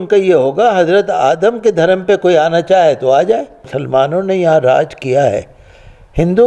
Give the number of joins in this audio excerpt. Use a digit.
1